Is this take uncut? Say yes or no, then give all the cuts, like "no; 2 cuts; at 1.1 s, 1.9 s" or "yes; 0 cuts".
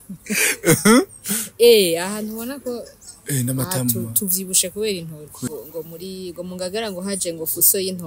no; 1 cut; at 5.5 s